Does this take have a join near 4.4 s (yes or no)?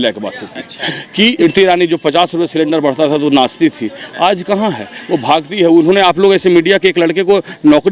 no